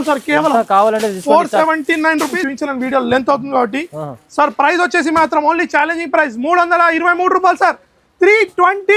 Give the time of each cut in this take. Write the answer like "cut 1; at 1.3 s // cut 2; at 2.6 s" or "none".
cut 1; at 2.4 s